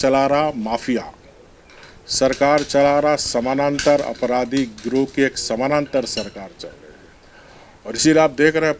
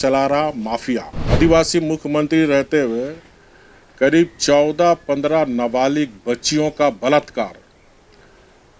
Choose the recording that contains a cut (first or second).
second